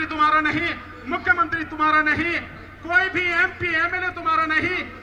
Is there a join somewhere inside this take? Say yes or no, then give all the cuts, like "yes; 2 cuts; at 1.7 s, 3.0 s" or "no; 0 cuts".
no; 0 cuts